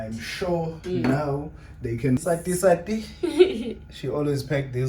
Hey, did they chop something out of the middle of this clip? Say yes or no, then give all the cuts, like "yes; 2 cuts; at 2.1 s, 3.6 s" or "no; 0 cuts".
yes; 1 cut; at 2.2 s